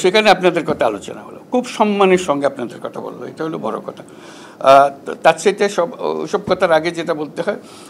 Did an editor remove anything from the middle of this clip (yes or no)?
no